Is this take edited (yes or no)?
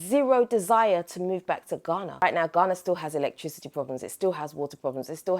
yes